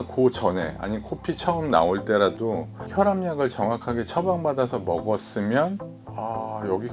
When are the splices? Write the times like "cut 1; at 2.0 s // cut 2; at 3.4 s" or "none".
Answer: cut 1; at 2.8 s // cut 2; at 6.0 s